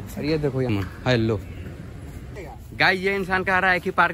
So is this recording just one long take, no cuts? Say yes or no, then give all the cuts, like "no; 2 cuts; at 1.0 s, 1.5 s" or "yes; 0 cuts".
no; 2 cuts; at 0.8 s, 2.2 s